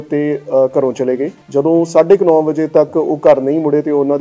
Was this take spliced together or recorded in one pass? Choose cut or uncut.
cut